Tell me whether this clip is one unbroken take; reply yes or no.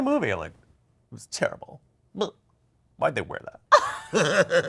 no